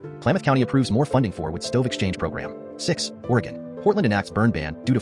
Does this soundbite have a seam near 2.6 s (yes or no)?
yes